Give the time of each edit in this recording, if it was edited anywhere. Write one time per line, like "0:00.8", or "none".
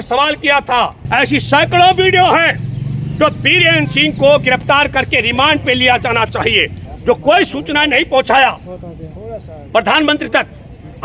0:01.0
0:06.8